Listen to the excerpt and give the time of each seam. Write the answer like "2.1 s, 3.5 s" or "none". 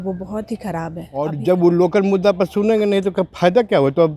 1.3 s